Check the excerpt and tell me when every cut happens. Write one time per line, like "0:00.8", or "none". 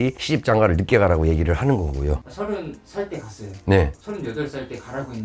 0:02.3